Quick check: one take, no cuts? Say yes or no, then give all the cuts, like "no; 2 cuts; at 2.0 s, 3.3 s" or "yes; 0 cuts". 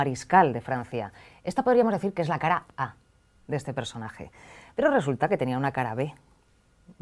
no; 1 cut; at 3.6 s